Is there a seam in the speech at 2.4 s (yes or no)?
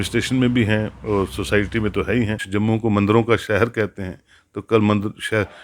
yes